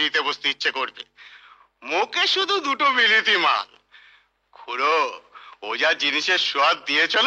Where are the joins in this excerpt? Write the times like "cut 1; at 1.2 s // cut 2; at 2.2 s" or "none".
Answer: none